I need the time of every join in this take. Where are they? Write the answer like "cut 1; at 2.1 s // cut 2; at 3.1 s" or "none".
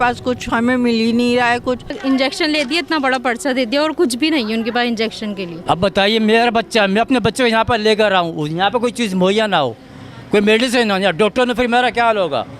cut 1; at 2.0 s // cut 2; at 5.5 s